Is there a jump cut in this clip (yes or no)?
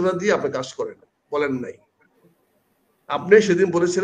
no